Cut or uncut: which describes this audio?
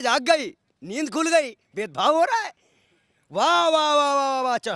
uncut